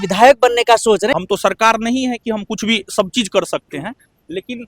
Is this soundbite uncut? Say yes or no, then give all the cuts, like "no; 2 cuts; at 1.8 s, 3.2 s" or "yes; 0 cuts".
no; 1 cut; at 1.2 s